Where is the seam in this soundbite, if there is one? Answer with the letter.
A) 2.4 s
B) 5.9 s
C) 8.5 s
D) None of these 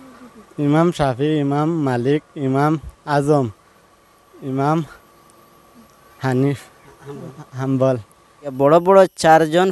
C